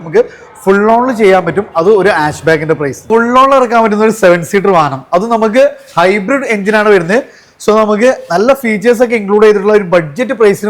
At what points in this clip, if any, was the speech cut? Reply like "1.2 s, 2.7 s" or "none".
3.0 s